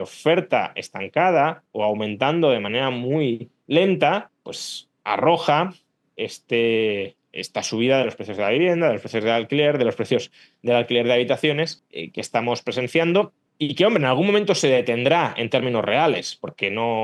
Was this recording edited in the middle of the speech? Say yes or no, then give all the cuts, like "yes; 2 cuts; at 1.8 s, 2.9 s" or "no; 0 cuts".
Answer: no; 0 cuts